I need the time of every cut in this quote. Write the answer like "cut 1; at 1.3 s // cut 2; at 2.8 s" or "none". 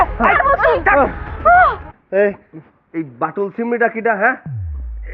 cut 1; at 1.9 s